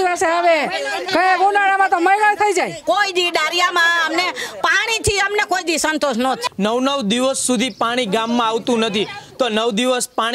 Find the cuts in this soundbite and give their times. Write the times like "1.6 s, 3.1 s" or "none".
2.8 s, 6.4 s